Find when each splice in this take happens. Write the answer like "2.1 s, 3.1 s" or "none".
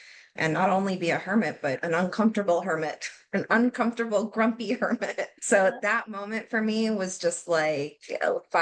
5.3 s